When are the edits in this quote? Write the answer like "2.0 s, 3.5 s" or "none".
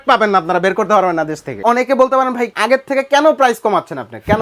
1.6 s, 2.5 s

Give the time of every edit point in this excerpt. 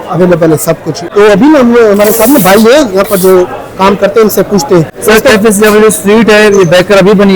1.0 s, 4.9 s

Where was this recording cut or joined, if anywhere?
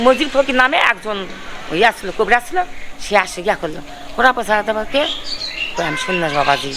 none

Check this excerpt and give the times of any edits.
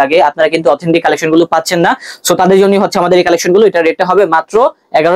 none

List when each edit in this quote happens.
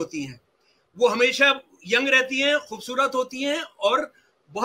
none

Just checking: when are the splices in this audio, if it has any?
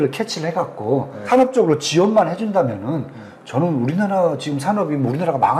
1.3 s

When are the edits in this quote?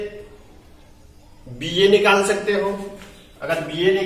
none

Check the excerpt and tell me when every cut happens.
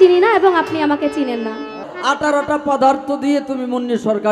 1.8 s

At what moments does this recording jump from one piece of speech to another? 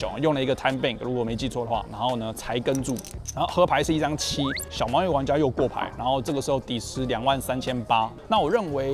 none

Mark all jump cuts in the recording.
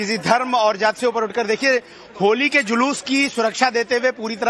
2.3 s

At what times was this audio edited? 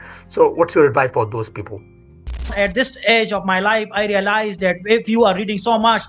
2.5 s

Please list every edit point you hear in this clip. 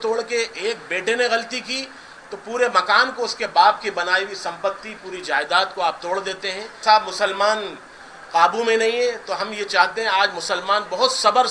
6.8 s

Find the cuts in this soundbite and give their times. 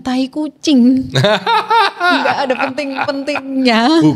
none

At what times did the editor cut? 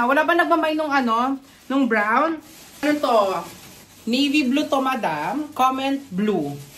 2.8 s

